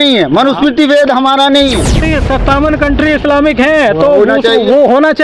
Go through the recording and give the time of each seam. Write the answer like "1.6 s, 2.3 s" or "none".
2.0 s